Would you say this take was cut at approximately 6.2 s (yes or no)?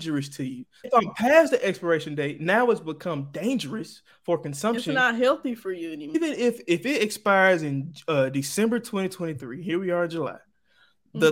yes